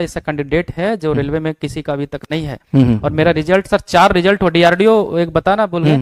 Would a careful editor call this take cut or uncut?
uncut